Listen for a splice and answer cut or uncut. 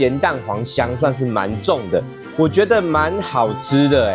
uncut